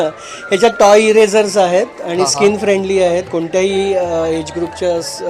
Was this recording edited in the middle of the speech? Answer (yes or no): no